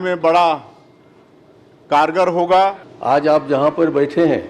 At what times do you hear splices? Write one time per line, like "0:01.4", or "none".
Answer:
0:02.9